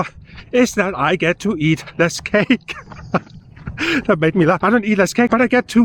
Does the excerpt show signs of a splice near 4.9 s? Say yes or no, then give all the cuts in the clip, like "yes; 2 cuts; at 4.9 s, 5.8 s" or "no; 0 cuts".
yes; 1 cut; at 4.9 s